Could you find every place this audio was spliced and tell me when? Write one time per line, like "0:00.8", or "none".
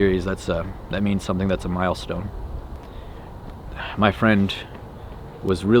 0:02.8